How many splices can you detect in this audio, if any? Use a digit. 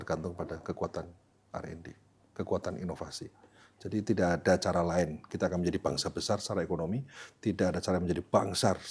0